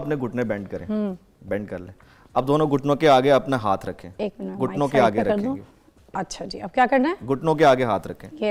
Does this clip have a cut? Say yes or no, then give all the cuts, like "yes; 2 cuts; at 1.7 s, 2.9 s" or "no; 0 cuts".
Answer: no; 0 cuts